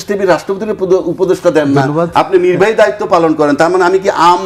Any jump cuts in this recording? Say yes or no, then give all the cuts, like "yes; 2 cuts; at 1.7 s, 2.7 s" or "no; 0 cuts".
no; 0 cuts